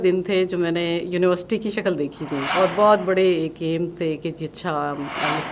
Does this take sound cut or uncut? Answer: cut